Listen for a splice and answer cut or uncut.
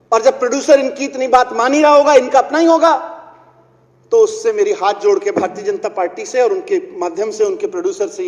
uncut